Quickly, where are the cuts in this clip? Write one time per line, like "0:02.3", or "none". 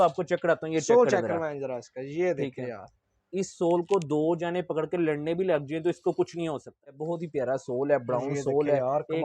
0:07.0